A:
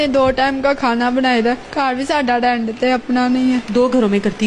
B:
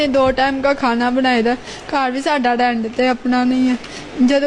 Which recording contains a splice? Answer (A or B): A